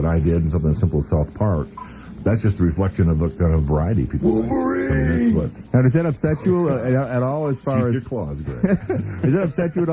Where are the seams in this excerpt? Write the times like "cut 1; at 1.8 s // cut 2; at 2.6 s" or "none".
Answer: cut 1; at 7.6 s